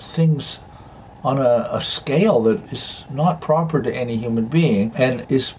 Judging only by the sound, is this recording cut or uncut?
uncut